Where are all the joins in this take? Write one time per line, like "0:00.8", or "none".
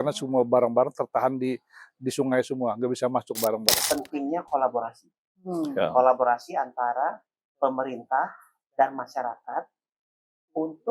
0:03.7